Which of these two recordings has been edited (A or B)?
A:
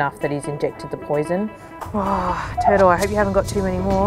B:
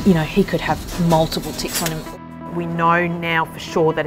B